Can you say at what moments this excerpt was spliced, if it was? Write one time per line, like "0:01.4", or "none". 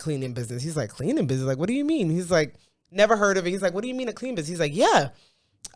none